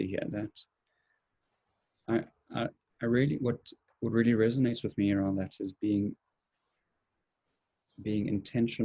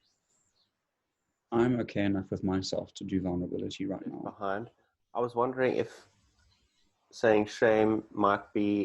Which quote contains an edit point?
second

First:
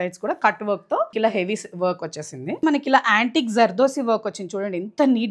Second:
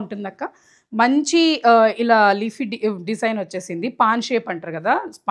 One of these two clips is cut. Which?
first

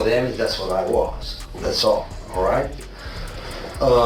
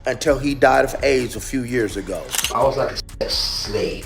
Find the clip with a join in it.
second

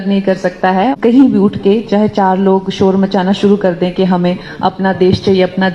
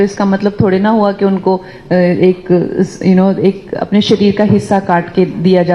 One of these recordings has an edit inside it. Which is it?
first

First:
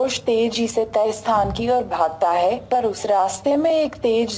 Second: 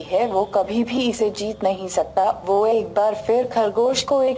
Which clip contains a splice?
second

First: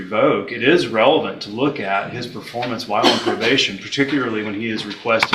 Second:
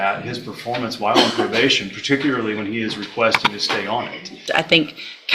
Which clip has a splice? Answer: second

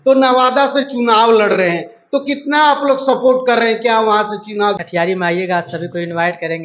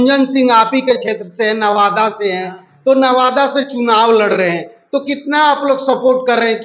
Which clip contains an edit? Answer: first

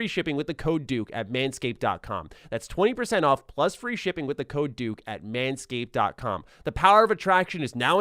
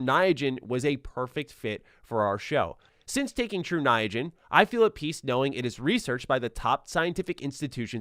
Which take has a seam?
second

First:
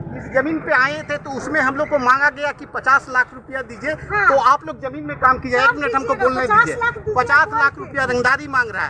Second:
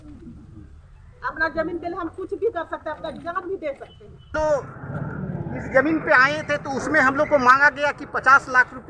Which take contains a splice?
second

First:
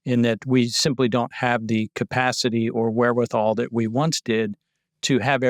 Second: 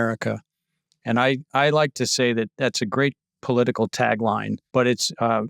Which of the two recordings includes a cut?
second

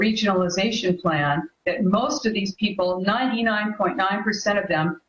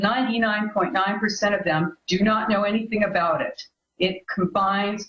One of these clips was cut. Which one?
second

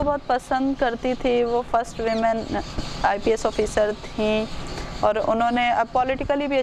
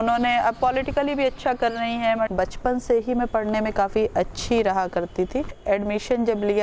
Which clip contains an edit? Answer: second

